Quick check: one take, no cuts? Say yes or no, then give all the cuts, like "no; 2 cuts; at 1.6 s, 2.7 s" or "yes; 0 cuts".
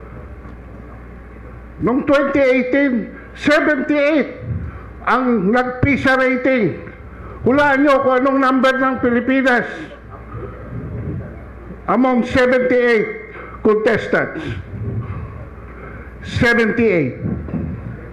yes; 0 cuts